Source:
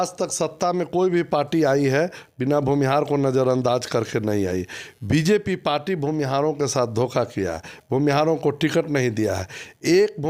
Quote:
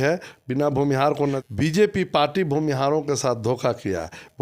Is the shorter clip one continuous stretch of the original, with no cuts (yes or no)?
no